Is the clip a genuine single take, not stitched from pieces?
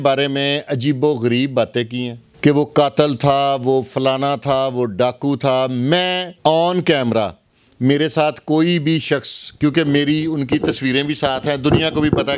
yes; 0 cuts

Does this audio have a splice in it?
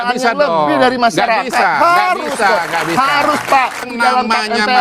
yes; 1 cut; at 3.9 s

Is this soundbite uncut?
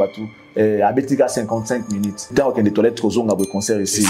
no; 1 cut; at 2.3 s

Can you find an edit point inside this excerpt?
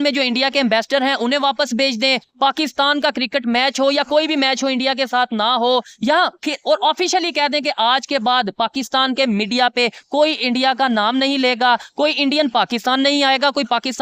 no; 0 cuts

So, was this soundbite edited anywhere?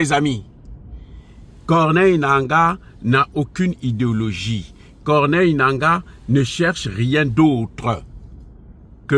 no; 0 cuts

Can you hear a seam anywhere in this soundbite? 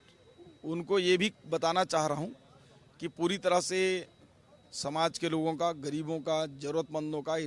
no; 0 cuts

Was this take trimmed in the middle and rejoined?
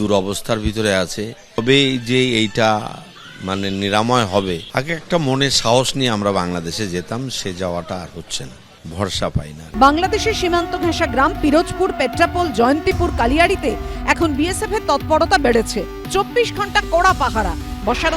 no; 0 cuts

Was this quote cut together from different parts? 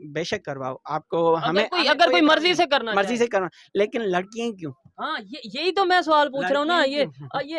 no; 0 cuts

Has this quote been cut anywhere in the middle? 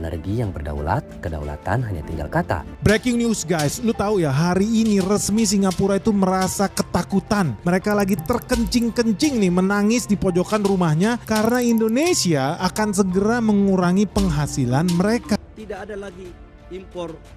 yes; 2 cuts; at 2.9 s, 15.4 s

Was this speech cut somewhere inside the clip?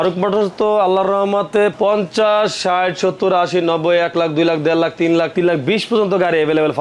yes; 2 cuts; at 1.7 s, 5.3 s

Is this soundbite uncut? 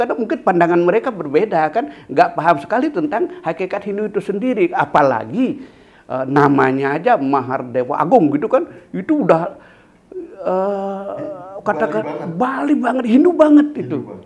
yes; 0 cuts

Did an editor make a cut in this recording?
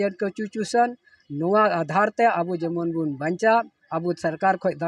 no; 0 cuts

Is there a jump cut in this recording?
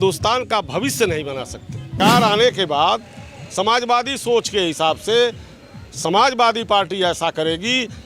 yes; 1 cut; at 2.0 s

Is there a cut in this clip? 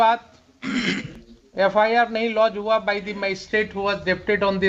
no; 0 cuts

